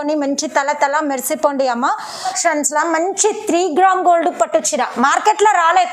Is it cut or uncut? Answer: cut